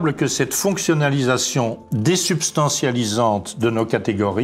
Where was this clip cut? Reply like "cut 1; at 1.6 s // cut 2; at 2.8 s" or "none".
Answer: none